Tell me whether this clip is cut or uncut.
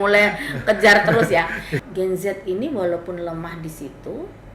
cut